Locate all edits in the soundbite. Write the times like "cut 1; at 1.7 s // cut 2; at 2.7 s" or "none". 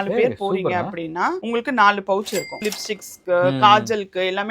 cut 1; at 2.6 s